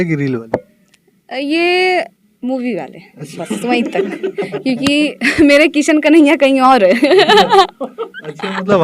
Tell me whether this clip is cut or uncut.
uncut